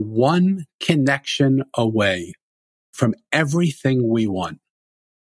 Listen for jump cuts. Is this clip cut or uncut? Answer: uncut